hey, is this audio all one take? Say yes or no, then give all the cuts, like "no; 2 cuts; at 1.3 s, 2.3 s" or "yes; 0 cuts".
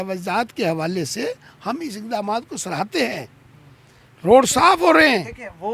yes; 0 cuts